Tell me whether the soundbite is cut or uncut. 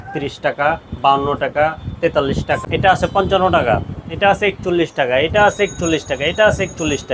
cut